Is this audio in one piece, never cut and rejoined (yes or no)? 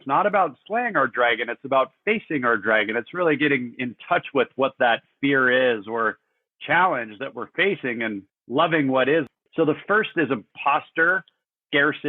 no